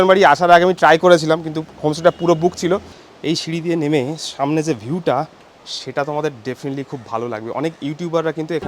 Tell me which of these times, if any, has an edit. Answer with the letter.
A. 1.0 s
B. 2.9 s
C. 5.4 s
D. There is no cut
B